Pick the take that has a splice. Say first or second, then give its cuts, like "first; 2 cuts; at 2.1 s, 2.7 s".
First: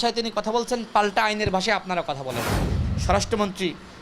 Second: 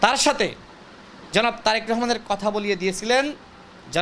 first; 1 cut; at 2.8 s